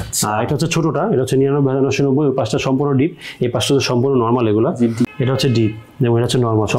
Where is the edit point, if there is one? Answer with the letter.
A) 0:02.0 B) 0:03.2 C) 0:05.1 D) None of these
C